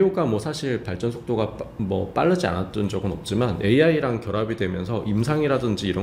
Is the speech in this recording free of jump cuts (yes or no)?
yes